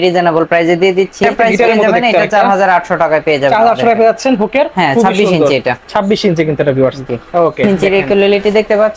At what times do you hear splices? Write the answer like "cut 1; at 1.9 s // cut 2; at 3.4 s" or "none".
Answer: cut 1; at 1.2 s // cut 2; at 7.6 s